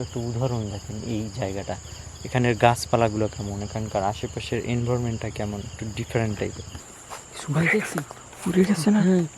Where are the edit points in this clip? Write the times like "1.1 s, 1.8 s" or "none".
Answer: 6.7 s